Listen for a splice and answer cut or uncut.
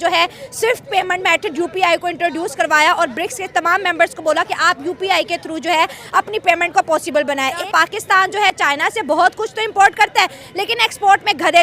cut